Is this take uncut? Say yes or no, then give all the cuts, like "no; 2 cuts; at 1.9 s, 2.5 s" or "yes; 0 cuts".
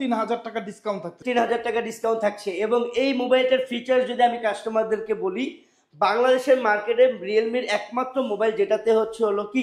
no; 1 cut; at 1.2 s